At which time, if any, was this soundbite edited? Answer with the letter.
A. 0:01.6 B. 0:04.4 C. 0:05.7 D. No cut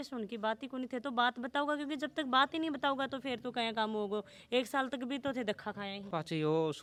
D